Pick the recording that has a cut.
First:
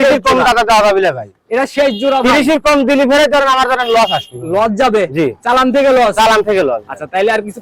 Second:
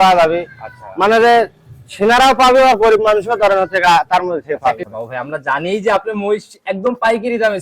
second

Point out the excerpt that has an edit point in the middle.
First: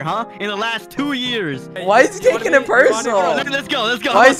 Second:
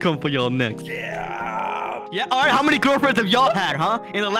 first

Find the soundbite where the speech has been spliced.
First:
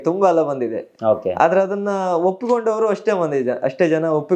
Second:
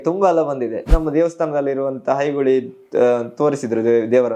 second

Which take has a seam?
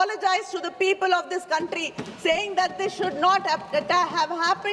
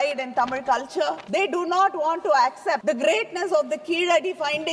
second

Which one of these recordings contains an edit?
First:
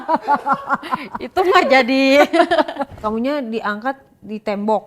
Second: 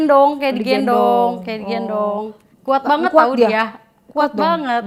first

